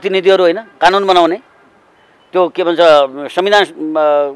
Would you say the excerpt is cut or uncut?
uncut